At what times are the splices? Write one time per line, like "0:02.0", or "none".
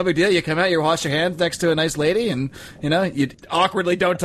0:03.3